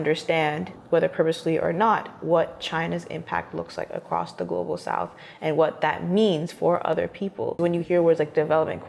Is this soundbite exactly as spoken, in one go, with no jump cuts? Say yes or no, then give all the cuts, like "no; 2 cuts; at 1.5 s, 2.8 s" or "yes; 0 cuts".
no; 1 cut; at 7.6 s